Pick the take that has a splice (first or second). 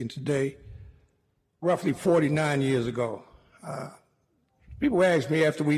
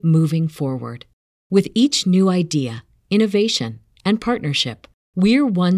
first